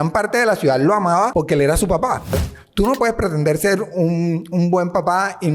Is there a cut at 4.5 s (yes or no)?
no